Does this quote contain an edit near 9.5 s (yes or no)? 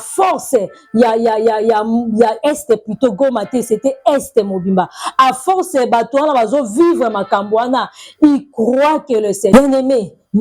yes